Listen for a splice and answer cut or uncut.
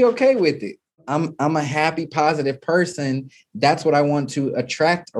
cut